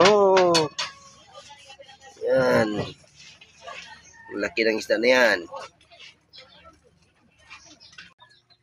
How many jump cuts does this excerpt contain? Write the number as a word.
zero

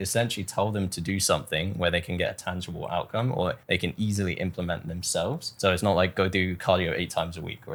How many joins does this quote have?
zero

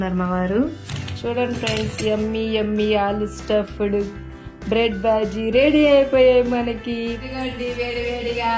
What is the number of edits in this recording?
two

